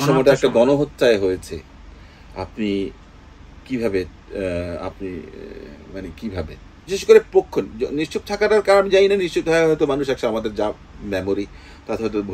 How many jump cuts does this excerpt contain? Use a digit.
1